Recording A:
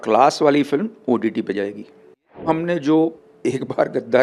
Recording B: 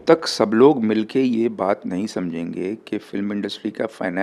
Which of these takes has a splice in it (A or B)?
A